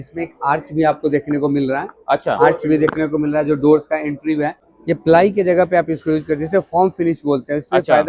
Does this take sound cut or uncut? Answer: cut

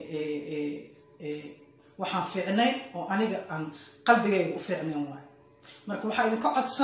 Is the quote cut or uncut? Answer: uncut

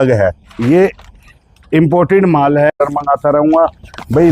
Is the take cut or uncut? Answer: cut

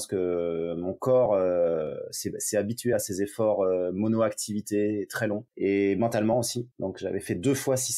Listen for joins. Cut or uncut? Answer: cut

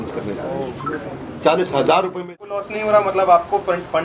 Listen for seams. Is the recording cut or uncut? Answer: cut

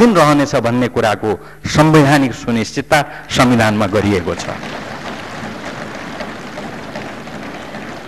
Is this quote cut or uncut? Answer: uncut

